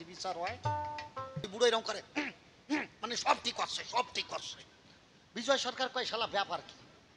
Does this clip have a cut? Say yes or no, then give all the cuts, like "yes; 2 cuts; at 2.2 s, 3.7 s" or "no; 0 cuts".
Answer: yes; 1 cut; at 1.5 s